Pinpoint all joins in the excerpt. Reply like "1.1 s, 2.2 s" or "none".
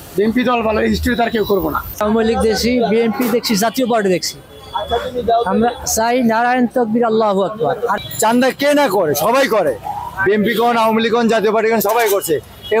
1.8 s, 8.0 s